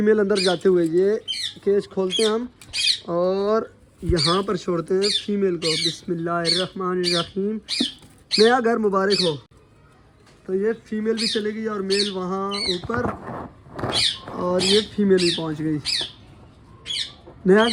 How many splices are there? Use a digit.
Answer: 0